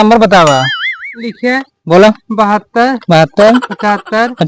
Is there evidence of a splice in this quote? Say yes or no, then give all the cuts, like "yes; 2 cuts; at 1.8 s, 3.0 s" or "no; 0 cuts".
no; 0 cuts